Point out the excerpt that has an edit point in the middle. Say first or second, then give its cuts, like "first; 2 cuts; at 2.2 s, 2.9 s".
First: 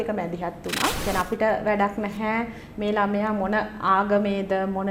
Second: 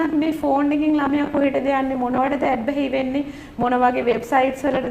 first; 1 cut; at 1.0 s